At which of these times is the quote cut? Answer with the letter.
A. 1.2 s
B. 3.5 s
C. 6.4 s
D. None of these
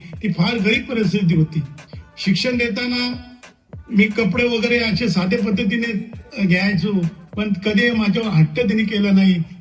D